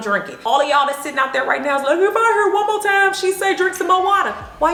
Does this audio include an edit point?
no; 0 cuts

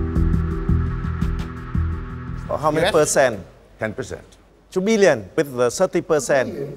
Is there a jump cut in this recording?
no; 0 cuts

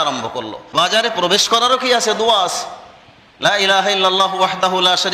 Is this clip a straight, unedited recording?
no; 1 cut; at 0.9 s

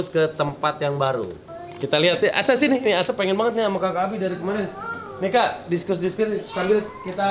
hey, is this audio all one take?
yes; 0 cuts

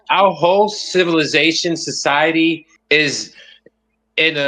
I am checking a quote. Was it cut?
yes; 1 cut; at 2.7 s

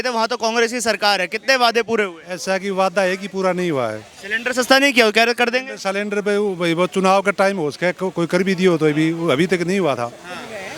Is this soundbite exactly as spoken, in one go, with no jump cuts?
yes; 0 cuts

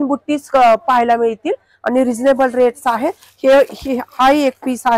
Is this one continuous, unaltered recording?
yes; 0 cuts

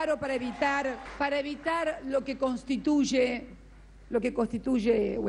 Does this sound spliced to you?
yes; 1 cut; at 1.1 s

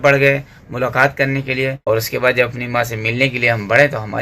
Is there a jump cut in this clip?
yes; 1 cut; at 1.8 s

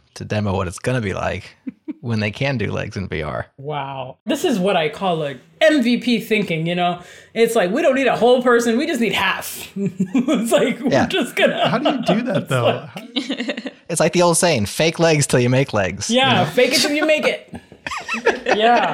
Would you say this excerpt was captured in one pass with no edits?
yes; 0 cuts

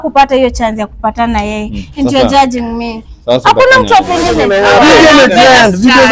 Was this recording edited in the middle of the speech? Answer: yes; 1 cut; at 4.4 s

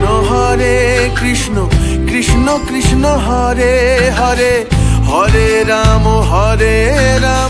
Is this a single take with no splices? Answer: yes; 0 cuts

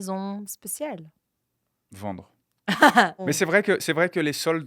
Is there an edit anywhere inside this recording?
yes; 1 cut; at 3.2 s

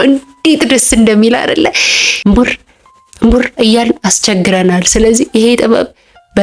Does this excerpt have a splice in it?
yes; 1 cut; at 2.1 s

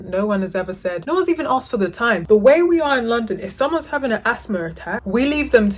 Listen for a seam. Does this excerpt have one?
yes; 2 cuts; at 1.0 s, 2.2 s

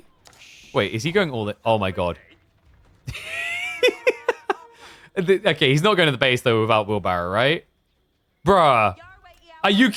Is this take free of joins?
yes; 0 cuts

